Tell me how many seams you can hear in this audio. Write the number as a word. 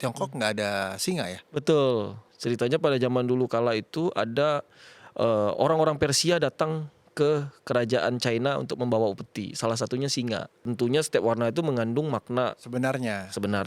two